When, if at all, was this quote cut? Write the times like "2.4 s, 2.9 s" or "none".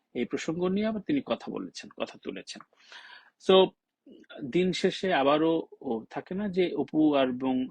none